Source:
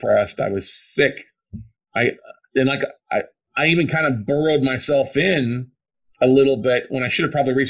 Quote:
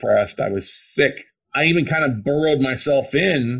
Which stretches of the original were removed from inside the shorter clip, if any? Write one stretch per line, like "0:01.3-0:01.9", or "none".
0:01.4-0:03.4